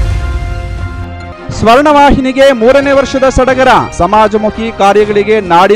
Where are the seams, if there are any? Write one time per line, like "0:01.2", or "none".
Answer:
0:01.3